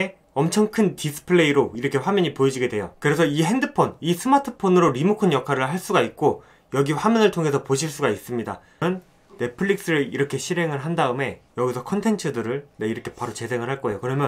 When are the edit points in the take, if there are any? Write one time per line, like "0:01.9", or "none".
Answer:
0:08.8